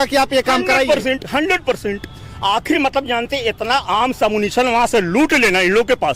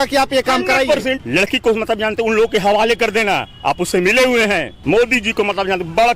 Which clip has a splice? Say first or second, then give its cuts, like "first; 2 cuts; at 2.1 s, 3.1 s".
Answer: second; 2 cuts; at 1.2 s, 4.7 s